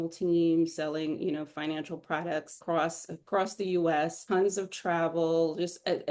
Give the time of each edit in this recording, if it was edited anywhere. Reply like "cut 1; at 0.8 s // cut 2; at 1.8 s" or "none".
none